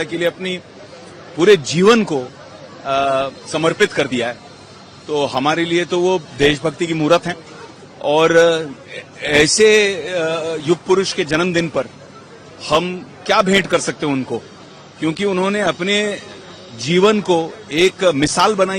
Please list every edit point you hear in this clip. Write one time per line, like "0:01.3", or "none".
none